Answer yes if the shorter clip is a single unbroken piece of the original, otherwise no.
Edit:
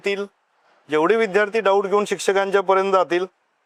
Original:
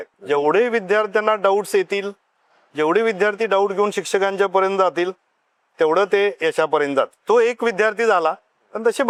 yes